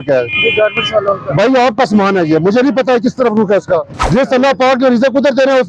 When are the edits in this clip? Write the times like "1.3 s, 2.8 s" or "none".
4.0 s